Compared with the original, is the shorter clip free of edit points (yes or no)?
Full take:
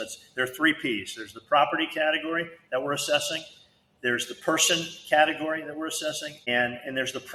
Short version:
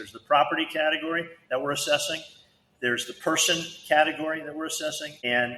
yes